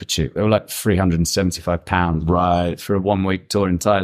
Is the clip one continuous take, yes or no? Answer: yes